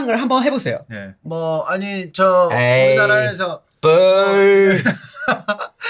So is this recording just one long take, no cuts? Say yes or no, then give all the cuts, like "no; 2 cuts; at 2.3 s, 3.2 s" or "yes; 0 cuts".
no; 1 cut; at 1.2 s